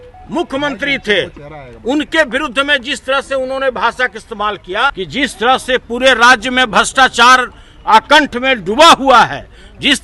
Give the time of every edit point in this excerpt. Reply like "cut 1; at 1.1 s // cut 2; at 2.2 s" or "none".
cut 1; at 5.0 s